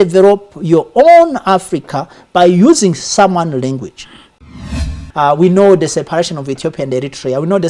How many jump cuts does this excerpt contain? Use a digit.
1